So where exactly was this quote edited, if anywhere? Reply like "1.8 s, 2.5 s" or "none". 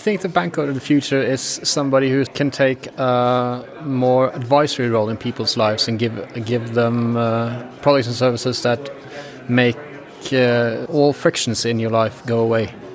2.3 s, 10.8 s